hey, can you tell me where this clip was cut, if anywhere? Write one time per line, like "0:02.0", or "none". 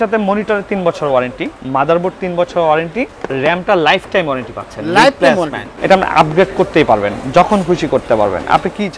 0:03.2
0:05.7